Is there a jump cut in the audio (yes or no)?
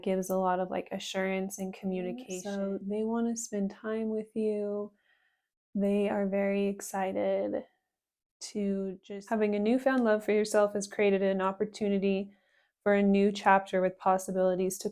yes